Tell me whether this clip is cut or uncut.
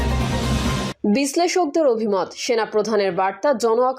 cut